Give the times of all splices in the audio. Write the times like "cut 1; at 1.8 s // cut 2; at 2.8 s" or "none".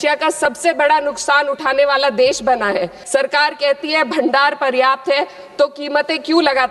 cut 1; at 3.0 s